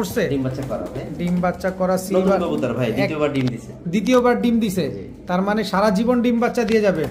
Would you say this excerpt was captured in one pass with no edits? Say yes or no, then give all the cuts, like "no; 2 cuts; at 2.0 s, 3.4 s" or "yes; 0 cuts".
yes; 0 cuts